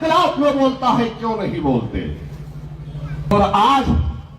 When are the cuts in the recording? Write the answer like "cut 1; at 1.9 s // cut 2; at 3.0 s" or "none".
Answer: cut 1; at 3.3 s